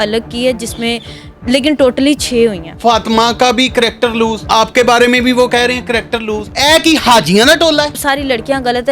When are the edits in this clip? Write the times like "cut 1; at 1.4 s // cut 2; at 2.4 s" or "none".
cut 1; at 2.7 s // cut 2; at 4.4 s // cut 3; at 6.5 s // cut 4; at 8.0 s